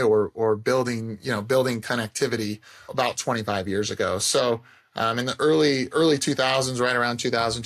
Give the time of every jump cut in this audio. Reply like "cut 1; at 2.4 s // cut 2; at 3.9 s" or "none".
cut 1; at 2.9 s